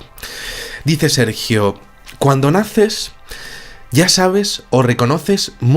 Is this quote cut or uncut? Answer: cut